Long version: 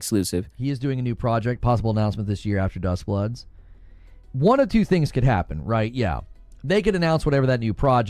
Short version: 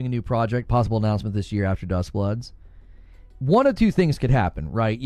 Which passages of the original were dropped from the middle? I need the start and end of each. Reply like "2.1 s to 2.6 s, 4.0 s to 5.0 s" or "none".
none